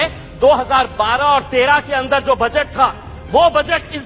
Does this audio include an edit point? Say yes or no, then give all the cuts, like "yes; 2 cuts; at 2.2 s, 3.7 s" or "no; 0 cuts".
no; 0 cuts